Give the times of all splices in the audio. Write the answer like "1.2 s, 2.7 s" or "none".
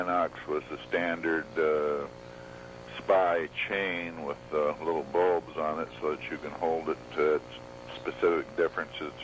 none